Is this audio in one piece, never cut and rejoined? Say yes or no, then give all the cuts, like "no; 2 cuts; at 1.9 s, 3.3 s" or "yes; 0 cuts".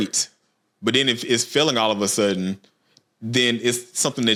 yes; 0 cuts